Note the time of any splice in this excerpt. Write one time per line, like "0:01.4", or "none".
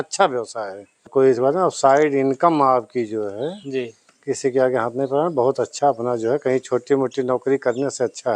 0:01.1
0:05.7